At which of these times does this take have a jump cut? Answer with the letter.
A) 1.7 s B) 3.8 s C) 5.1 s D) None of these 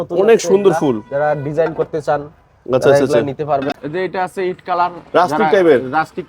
B